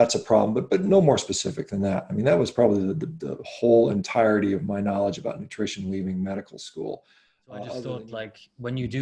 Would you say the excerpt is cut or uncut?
cut